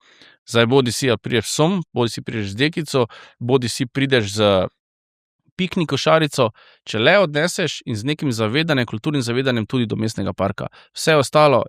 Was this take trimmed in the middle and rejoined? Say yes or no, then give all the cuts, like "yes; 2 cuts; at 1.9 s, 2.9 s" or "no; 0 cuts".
no; 0 cuts